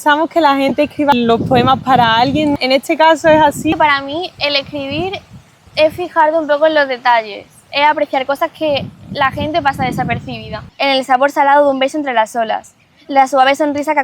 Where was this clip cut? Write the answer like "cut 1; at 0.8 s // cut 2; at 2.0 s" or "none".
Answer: cut 1; at 2.6 s // cut 2; at 3.7 s // cut 3; at 10.6 s